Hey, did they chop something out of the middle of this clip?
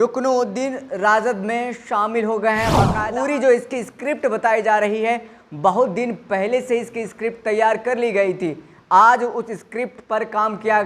yes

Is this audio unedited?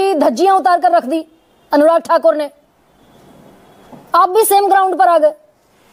yes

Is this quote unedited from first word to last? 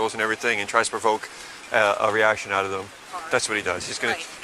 no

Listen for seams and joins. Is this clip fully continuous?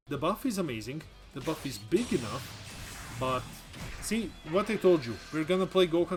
yes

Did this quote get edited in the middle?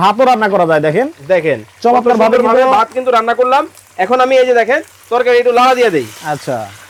no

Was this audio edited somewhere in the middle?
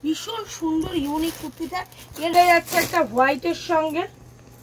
yes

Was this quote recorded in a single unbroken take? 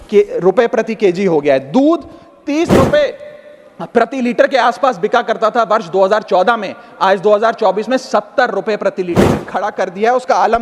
no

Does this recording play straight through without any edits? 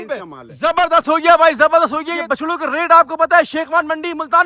no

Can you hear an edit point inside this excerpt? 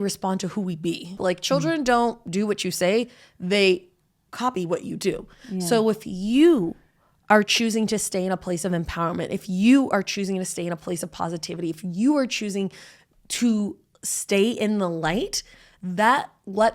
yes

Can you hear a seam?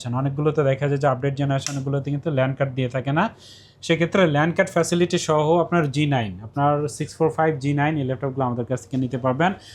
no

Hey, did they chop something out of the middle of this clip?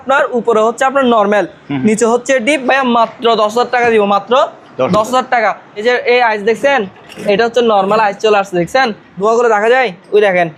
yes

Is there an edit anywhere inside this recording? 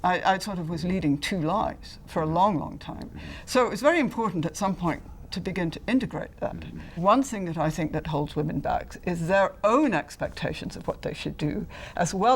yes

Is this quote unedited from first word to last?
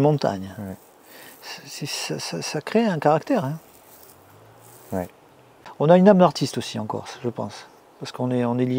no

